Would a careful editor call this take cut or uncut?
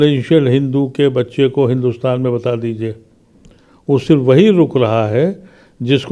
uncut